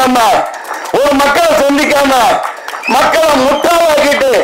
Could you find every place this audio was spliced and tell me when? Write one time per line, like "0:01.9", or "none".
none